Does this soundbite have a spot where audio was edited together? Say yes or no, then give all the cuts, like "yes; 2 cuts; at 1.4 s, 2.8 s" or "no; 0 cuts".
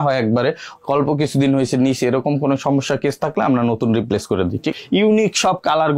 yes; 1 cut; at 4.7 s